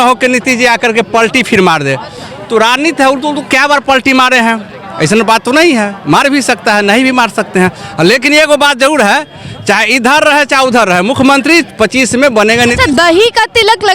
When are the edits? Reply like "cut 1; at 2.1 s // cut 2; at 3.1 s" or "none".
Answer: none